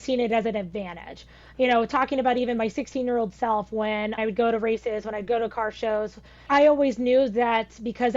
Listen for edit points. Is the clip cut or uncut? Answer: cut